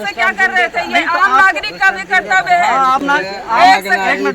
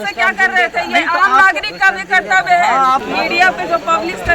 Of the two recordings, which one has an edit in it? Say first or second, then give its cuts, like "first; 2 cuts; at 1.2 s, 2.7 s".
second; 1 cut; at 3.0 s